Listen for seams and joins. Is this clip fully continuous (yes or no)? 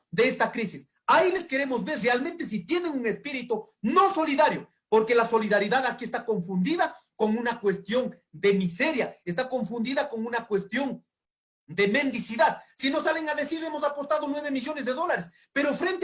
yes